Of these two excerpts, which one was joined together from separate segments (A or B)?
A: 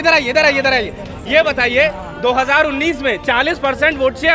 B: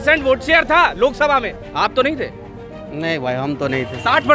B